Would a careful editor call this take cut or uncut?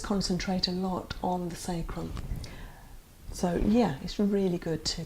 cut